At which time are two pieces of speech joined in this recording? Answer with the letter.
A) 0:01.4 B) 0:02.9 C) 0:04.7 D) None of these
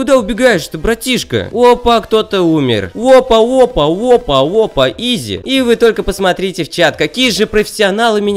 B